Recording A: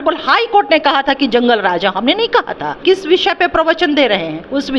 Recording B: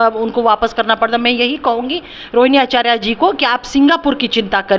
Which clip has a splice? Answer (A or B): A